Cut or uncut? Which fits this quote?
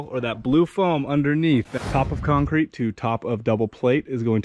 cut